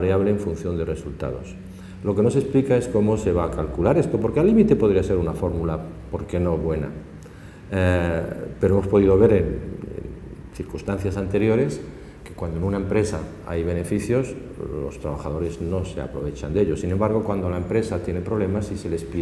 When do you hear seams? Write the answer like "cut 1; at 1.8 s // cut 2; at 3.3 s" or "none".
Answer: none